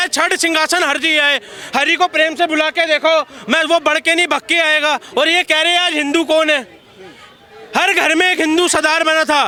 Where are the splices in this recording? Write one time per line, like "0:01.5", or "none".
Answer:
none

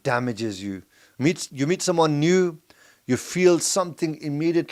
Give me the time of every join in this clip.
none

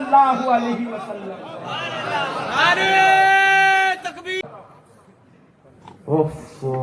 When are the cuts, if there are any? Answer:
0:04.4

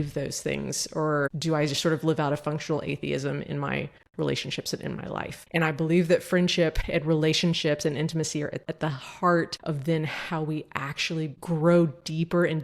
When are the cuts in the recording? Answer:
0:06.8
0:08.6
0:09.6

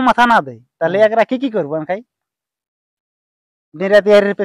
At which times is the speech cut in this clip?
none

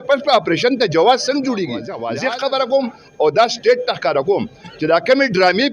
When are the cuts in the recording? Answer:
0:01.9

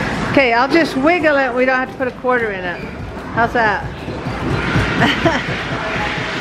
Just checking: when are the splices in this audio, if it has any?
none

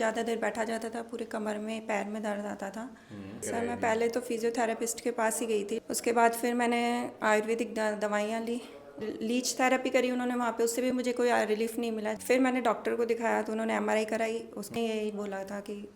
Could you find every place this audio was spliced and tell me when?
0:03.4
0:05.8
0:09.0
0:12.1
0:14.7

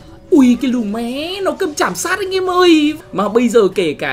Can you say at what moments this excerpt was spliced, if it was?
0:03.0

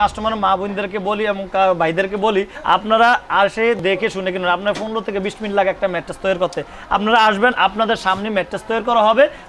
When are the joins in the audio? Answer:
0:02.5
0:03.8

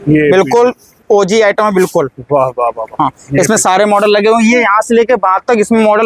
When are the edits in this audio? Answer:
none

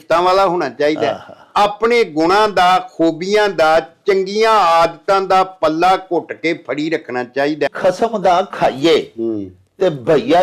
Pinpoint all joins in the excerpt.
0:07.7

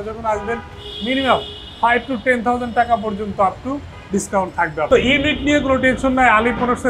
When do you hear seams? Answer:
0:04.9

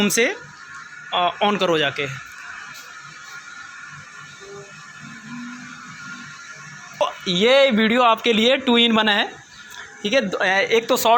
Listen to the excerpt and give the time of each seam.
0:07.0

